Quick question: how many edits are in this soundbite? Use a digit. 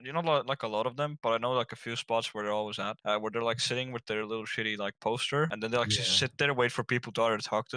2